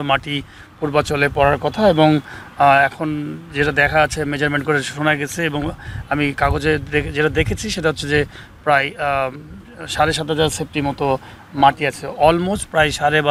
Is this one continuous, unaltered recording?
yes; 0 cuts

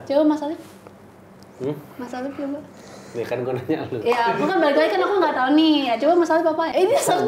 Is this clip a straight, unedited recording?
yes; 0 cuts

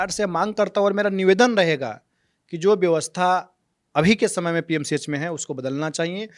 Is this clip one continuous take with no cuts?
yes; 0 cuts

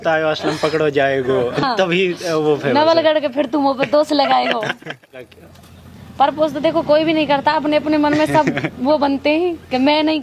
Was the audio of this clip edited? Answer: yes; 2 cuts; at 1.6 s, 5.3 s

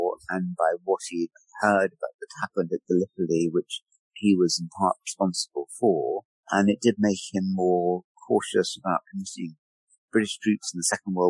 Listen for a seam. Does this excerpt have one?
yes; 1 cut; at 1.4 s

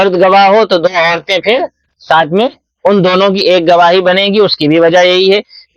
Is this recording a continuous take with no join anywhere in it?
yes; 0 cuts

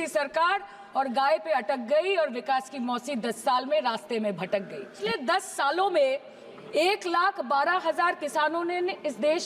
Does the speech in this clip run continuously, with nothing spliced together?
no; 1 cut; at 4.9 s

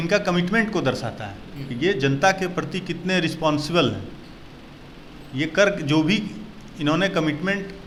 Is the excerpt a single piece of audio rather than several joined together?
yes; 0 cuts

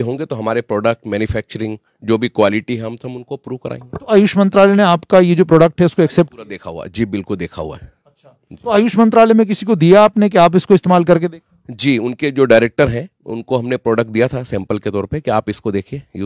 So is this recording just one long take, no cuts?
yes; 0 cuts

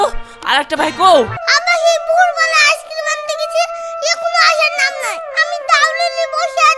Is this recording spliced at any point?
yes; 1 cut; at 1.4 s

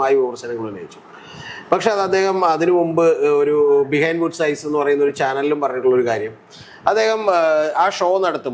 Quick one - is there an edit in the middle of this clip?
no; 0 cuts

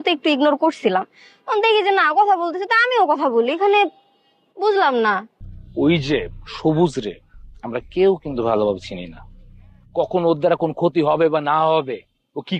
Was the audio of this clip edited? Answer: yes; 1 cut; at 5.3 s

